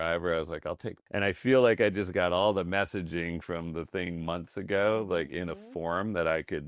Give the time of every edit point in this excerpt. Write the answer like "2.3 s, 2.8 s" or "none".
1.0 s